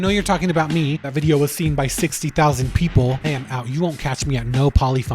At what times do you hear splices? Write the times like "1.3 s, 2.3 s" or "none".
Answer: 1.0 s, 3.2 s